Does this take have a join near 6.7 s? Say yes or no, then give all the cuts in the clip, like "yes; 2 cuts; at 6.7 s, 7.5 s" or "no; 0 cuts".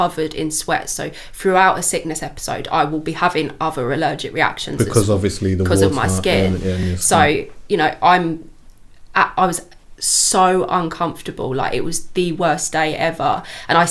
no; 0 cuts